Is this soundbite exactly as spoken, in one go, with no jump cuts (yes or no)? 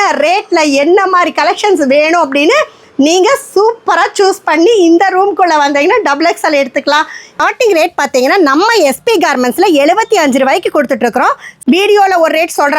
no